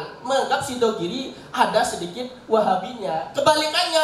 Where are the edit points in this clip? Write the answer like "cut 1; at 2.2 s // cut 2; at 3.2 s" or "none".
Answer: none